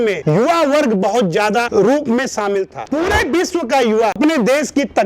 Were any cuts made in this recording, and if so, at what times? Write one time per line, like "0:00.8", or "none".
0:02.8
0:04.2

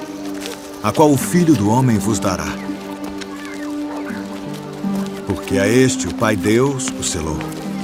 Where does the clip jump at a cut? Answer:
none

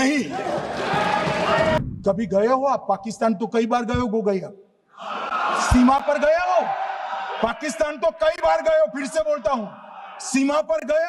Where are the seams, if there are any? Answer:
0:01.8

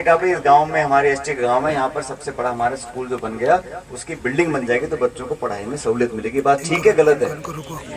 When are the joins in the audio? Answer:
none

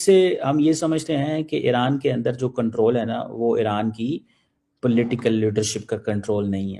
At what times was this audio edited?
none

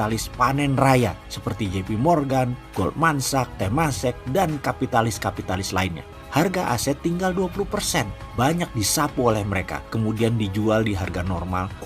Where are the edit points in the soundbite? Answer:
0:06.1

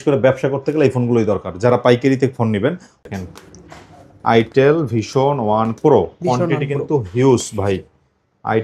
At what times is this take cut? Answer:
0:03.0

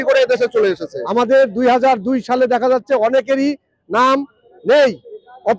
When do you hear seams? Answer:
0:00.9

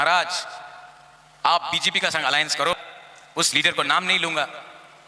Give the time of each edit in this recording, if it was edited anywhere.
0:02.7

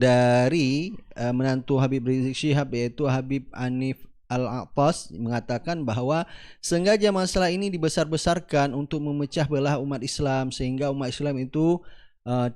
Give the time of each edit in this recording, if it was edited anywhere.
none

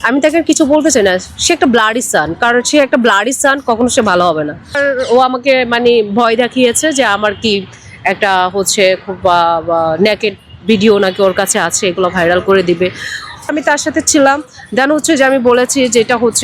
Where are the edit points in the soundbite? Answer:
0:04.7
0:13.5

